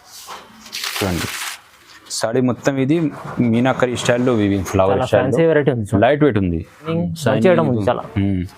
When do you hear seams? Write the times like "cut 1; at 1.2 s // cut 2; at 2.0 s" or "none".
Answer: cut 1; at 6.9 s

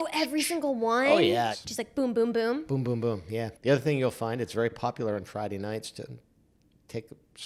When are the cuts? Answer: cut 1; at 3.5 s

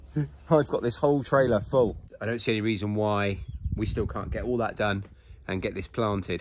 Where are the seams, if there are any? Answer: cut 1; at 2.1 s

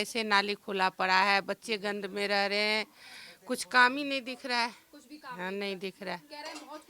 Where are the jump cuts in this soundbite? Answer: none

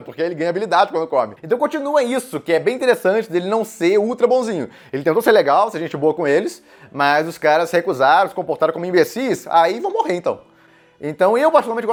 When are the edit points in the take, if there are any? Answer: none

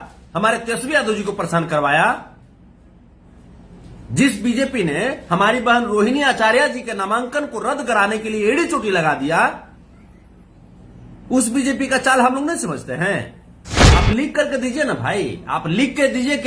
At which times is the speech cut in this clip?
cut 1; at 13.7 s

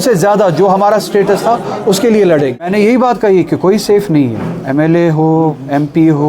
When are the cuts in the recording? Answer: cut 1; at 2.7 s

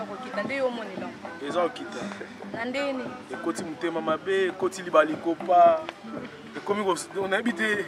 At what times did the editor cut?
none

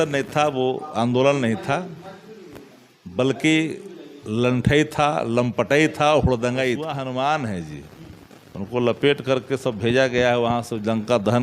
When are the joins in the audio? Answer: cut 1; at 6.9 s

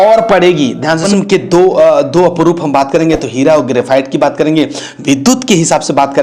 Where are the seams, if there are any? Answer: cut 1; at 1.0 s

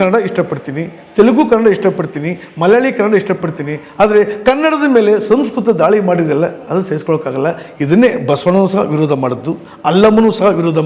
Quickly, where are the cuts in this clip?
none

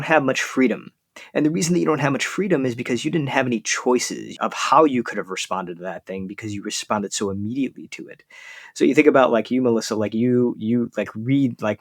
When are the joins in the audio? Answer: cut 1; at 4.2 s

